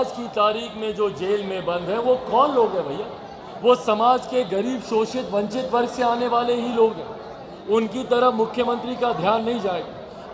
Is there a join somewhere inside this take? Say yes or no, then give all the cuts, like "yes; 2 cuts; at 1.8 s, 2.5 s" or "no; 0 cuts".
no; 0 cuts